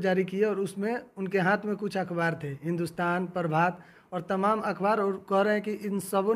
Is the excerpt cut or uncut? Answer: uncut